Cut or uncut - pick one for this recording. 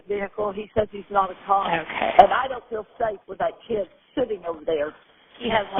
cut